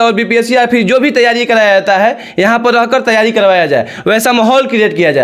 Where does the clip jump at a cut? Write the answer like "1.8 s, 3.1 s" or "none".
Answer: none